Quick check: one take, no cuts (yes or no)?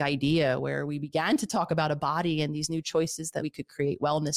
no